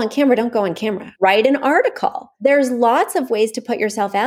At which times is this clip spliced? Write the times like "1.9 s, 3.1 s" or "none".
1.0 s, 2.2 s